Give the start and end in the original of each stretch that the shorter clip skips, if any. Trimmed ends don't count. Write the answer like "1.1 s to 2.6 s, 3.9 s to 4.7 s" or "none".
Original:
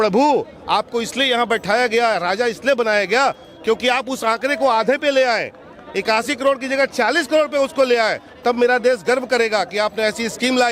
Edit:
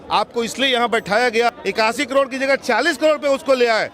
2.1 s to 5.8 s